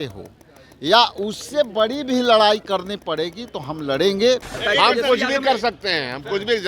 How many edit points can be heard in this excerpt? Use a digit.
1